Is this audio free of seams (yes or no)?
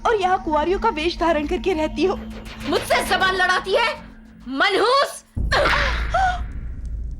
yes